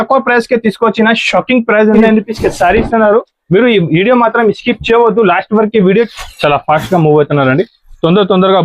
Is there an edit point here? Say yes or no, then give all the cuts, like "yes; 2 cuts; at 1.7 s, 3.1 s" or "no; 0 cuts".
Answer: yes; 2 cuts; at 2.0 s, 6.1 s